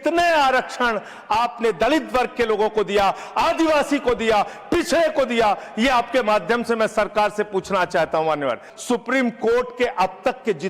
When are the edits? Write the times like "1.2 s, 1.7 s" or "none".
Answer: 8.7 s

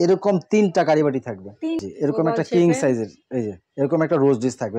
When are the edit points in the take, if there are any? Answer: 1.8 s

